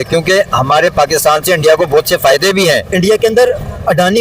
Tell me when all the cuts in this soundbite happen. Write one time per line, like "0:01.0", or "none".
0:02.9